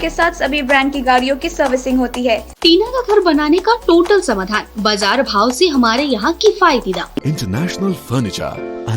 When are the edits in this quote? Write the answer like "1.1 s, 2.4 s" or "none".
2.5 s, 7.2 s

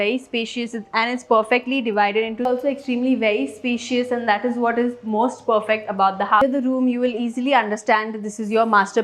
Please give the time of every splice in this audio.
2.5 s, 6.4 s

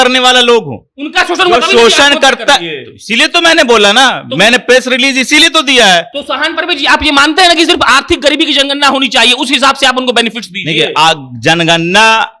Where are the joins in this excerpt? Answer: none

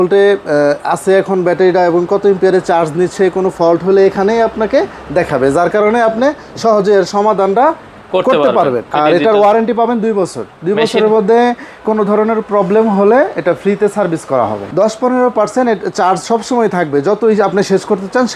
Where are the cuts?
8.9 s, 14.6 s

